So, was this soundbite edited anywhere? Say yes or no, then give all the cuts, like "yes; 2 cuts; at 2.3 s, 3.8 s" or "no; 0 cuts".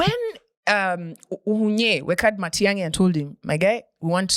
no; 0 cuts